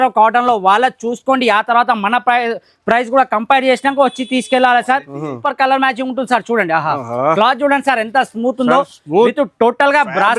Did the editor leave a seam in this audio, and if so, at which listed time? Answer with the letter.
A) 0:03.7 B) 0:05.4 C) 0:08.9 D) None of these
B